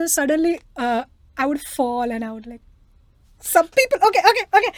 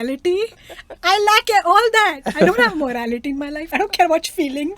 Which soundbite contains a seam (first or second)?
second